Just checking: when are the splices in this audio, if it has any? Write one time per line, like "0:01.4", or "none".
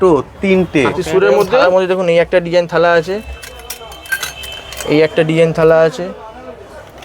0:01.6